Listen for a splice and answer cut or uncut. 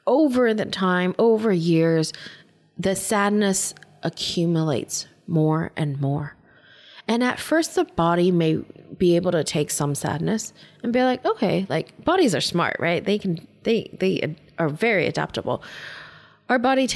uncut